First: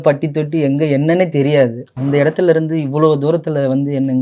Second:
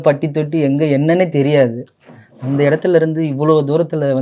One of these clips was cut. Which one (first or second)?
first